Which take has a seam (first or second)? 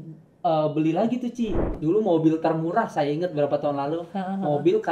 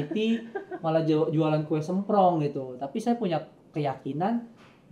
first